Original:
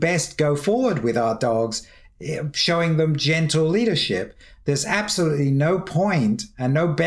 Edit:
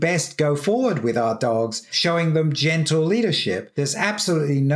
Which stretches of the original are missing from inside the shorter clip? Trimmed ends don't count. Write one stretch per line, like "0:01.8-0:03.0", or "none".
0:01.9-0:02.5
0:04.3-0:04.6